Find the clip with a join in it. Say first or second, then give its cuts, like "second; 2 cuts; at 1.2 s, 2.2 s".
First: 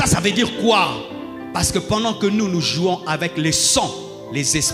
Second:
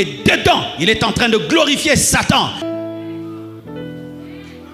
second; 1 cut; at 2.6 s